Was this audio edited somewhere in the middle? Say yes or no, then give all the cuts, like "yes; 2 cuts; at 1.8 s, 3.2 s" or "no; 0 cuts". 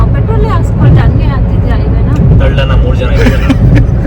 no; 0 cuts